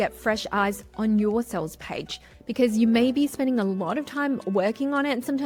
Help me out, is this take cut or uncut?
uncut